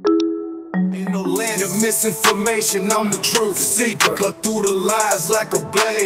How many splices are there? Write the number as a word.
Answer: one